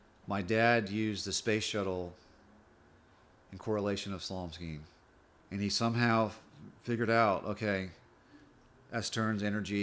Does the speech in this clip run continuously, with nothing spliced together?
no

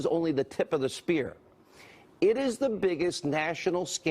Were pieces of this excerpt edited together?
yes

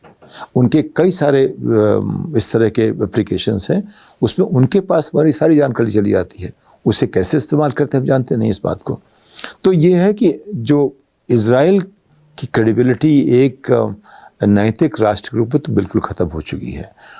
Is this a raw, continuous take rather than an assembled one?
yes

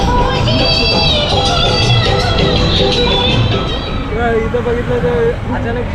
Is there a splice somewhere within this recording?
yes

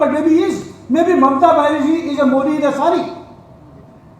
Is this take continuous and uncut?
yes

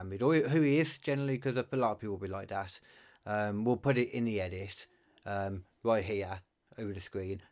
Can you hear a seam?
no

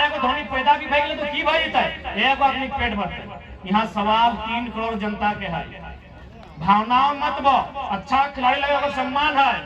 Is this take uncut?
yes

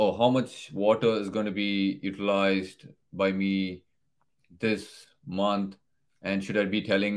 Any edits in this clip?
no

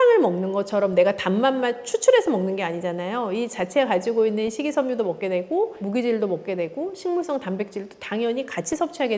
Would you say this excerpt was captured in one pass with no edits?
yes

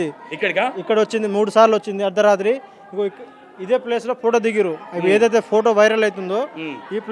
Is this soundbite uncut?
yes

